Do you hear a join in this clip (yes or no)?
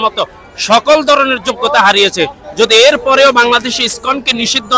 no